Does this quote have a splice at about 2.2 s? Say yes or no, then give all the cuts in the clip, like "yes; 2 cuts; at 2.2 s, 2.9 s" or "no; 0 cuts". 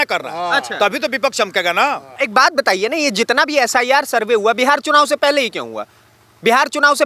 yes; 1 cut; at 2.2 s